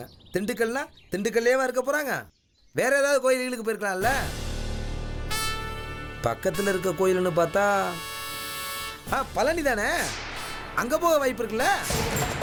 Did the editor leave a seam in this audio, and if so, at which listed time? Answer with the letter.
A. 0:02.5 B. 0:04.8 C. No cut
C